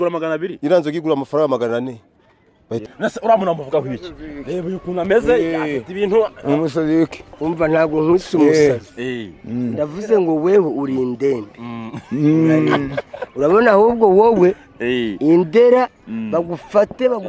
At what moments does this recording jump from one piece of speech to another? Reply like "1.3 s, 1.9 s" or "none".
2.8 s